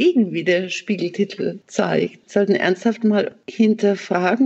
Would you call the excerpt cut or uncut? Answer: cut